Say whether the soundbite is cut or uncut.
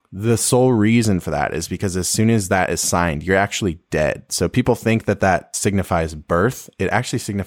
cut